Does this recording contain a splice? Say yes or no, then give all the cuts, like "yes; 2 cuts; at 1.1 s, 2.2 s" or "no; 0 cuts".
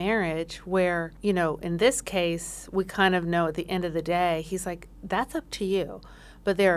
yes; 1 cut; at 1.1 s